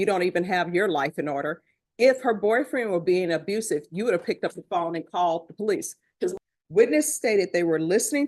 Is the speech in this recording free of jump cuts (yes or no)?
no